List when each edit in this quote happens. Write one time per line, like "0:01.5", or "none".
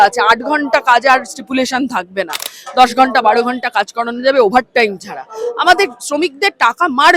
none